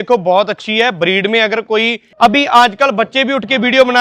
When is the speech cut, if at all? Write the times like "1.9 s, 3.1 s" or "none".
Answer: 2.0 s